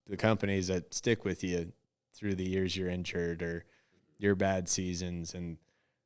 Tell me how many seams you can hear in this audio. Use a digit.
0